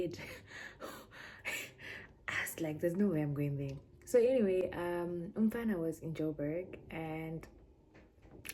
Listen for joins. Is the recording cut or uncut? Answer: uncut